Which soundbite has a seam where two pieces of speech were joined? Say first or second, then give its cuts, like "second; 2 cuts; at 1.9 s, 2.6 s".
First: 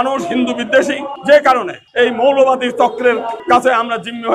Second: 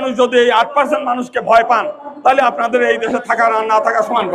first; 3 cuts; at 1.1 s, 1.8 s, 3.4 s